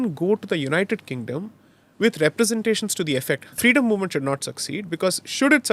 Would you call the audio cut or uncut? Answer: cut